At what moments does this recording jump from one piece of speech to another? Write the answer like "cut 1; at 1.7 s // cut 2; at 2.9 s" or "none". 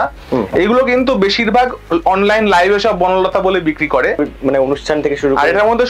cut 1; at 4.2 s